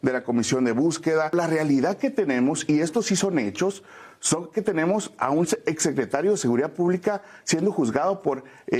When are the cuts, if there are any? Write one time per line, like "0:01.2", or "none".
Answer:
0:01.3